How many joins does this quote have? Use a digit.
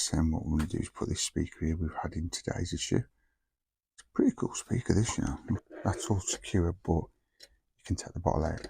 1